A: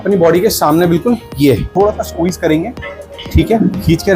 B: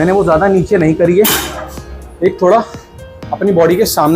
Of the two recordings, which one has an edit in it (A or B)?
A